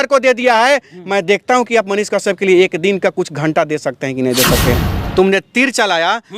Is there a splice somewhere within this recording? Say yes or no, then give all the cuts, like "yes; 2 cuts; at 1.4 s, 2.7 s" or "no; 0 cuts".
yes; 1 cut; at 4.9 s